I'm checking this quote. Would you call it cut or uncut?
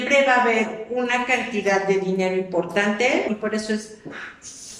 cut